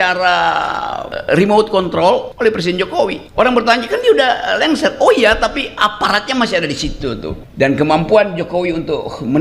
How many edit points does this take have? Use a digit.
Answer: 4